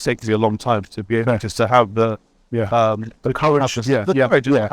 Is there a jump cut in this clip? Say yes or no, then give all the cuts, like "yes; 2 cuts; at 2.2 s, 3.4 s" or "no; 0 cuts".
no; 0 cuts